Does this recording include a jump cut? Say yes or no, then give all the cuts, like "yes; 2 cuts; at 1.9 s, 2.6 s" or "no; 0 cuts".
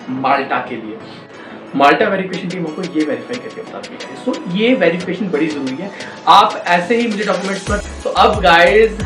yes; 2 cuts; at 1.1 s, 7.9 s